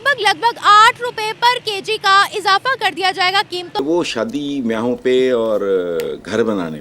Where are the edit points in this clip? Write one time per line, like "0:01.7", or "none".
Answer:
0:03.8